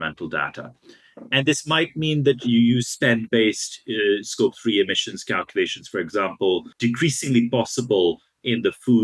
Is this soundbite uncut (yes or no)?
no